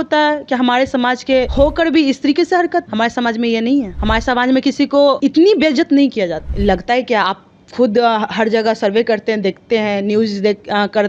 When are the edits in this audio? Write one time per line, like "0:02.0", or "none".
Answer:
0:01.5
0:02.9
0:03.9
0:05.2
0:06.4